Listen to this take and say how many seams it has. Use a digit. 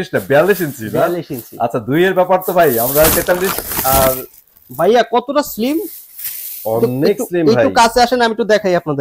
0